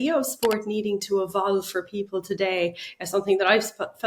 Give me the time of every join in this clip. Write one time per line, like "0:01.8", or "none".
none